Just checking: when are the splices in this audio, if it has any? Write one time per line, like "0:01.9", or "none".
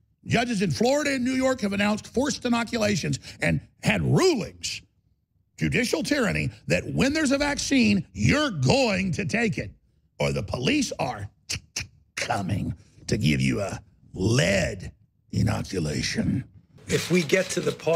0:16.7

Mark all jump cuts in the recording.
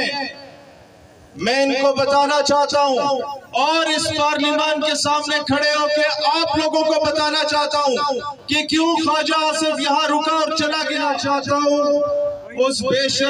0:11.1

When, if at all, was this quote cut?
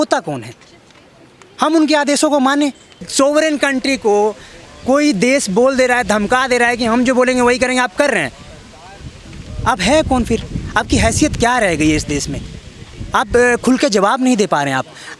0:03.1

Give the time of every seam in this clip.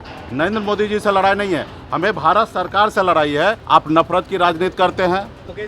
0:03.6

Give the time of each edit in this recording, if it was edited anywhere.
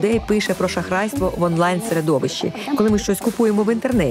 0:02.6

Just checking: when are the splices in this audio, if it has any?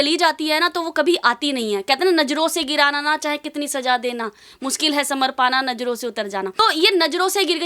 0:06.5

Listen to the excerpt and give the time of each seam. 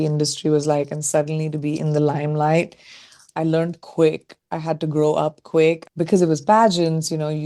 0:03.2
0:05.9

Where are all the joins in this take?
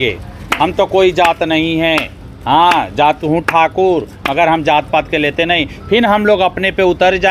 none

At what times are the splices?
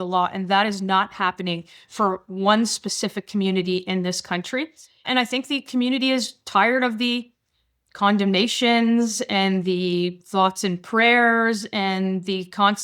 0:05.1

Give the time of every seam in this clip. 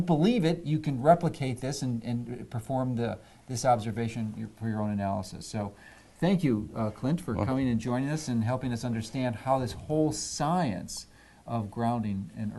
none

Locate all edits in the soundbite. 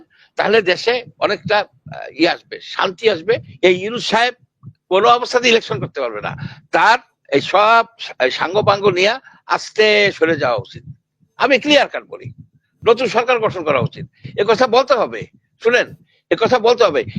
0:03.5

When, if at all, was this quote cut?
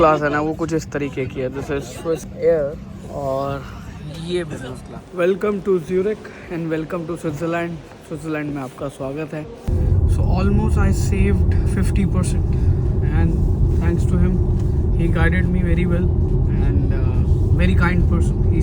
0:02.3
0:05.0
0:09.6

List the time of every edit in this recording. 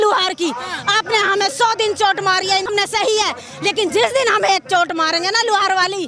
0:02.7

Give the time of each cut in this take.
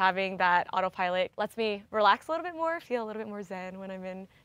0:01.4

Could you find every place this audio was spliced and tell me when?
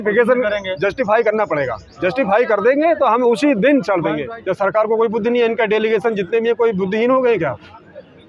0:04.3

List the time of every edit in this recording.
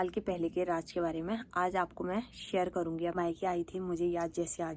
0:03.1

